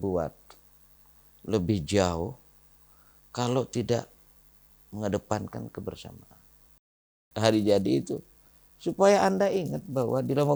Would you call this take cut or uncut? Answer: cut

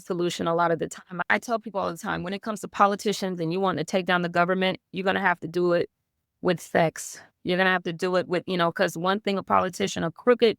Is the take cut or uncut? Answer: cut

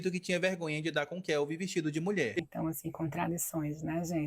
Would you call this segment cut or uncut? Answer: cut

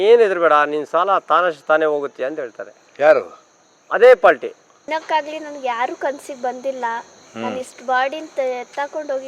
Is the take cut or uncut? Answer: cut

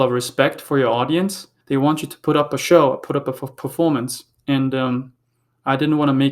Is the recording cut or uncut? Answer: cut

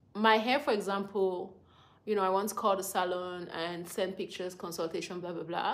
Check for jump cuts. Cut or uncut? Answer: uncut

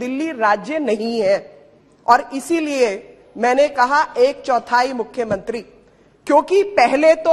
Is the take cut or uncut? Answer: uncut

